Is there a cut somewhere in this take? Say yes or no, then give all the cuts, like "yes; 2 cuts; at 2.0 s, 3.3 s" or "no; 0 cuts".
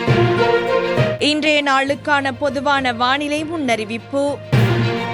no; 0 cuts